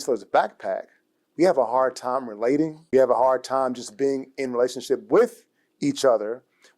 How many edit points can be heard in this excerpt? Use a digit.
1